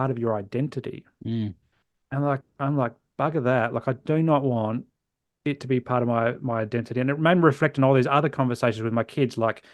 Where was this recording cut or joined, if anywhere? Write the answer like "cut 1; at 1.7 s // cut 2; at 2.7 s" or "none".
none